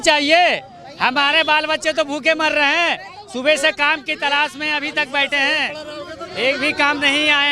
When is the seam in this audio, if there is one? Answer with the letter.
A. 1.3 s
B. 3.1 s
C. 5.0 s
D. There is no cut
D